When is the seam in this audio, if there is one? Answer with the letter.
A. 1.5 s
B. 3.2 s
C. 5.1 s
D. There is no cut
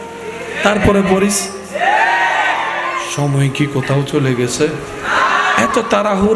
D